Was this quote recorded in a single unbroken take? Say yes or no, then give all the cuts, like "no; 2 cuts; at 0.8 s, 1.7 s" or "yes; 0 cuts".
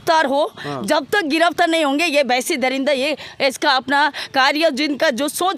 yes; 0 cuts